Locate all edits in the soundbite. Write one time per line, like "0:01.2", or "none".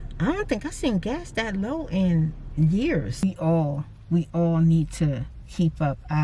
0:03.2